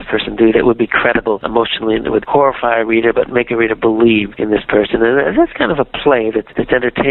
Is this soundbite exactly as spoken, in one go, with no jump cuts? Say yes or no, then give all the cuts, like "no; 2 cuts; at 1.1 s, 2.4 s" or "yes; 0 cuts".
yes; 0 cuts